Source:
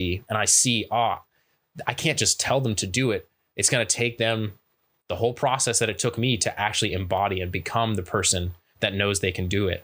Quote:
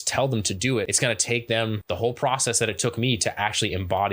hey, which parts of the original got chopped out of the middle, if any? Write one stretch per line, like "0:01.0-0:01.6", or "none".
0:03.3-0:03.6
0:04.5-0:05.0